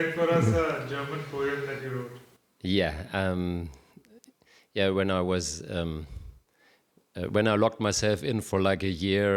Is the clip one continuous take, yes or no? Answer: yes